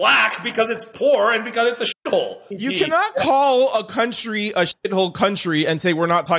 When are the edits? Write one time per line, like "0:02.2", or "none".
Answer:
0:02.4

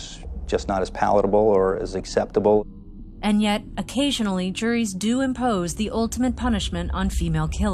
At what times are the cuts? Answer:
0:05.6

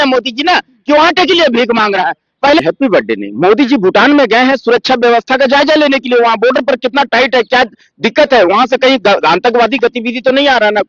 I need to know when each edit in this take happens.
0:02.6

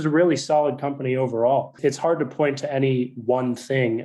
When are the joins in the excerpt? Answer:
0:01.8

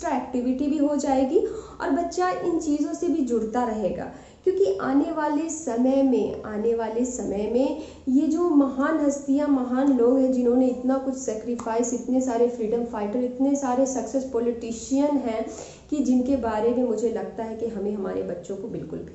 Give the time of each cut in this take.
none

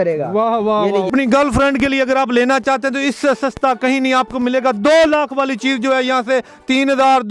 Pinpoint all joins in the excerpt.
0:01.1

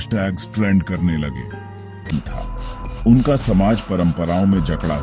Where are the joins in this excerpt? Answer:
0:02.1

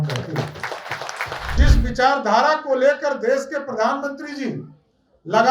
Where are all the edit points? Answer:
0:01.6

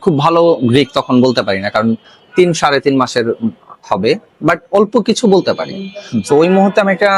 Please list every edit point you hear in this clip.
none

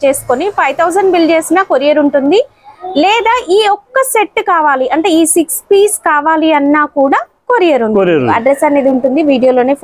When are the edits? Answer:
0:08.3

